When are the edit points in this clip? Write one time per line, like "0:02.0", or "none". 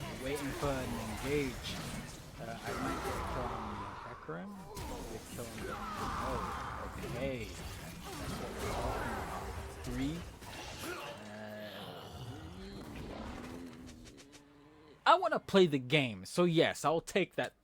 none